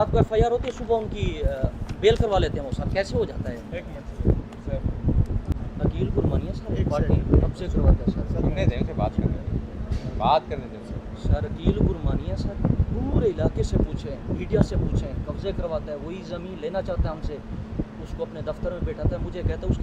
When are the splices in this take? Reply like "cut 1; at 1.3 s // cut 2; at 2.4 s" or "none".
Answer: cut 1; at 5.6 s